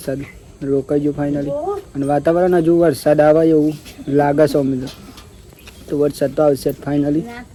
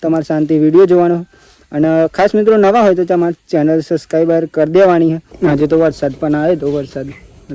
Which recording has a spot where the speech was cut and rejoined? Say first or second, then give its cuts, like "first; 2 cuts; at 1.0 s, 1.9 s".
second; 1 cut; at 5.3 s